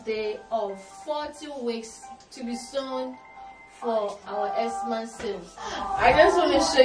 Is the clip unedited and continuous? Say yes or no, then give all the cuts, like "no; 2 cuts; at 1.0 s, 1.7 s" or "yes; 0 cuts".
no; 1 cut; at 5.8 s